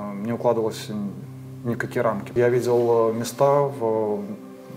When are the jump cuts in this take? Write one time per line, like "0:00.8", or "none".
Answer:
0:02.3

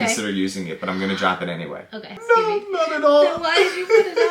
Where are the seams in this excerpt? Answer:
0:02.1

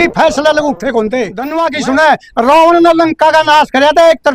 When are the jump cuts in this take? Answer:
0:01.4

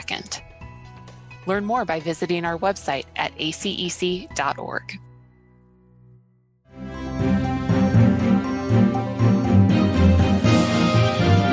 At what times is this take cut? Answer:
0:06.7

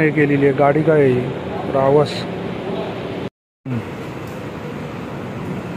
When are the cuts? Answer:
0:03.5

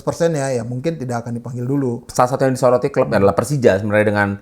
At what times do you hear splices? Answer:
0:02.1

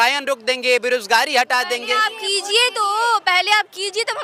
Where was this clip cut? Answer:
none

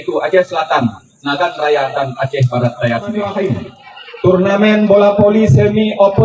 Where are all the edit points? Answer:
0:03.2

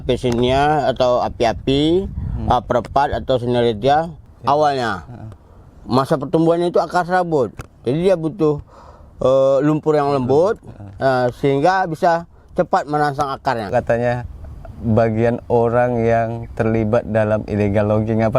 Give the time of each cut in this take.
0:04.2
0:13.7

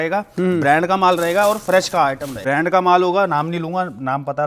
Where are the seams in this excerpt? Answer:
0:02.3

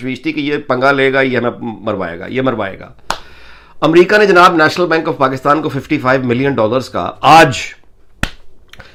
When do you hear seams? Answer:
none

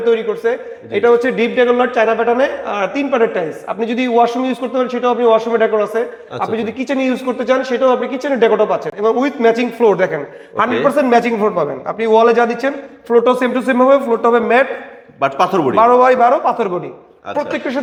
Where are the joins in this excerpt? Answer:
none

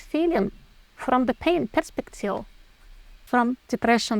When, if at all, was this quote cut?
0:03.2

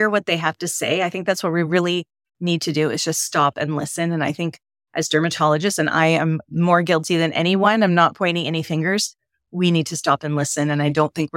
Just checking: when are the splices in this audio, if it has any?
none

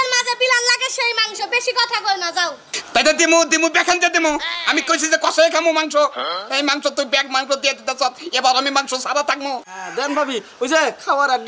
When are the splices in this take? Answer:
0:02.7
0:09.8

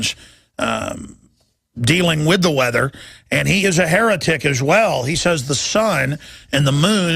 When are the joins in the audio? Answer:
0:04.2

